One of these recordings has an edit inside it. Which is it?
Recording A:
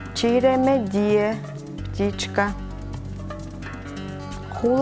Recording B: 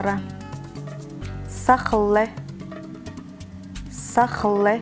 B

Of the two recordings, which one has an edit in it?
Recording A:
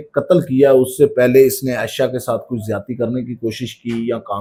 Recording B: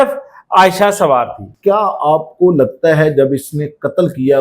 B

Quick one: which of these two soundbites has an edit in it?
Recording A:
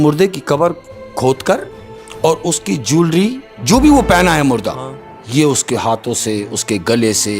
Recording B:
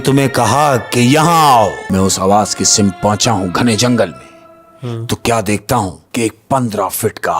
B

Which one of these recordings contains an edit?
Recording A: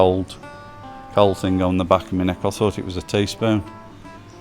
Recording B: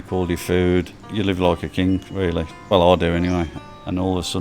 B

